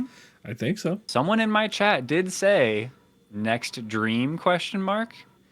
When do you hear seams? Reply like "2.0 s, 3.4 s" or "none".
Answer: 1.0 s